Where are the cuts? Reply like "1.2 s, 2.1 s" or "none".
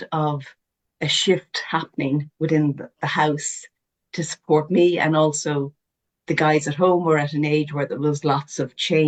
none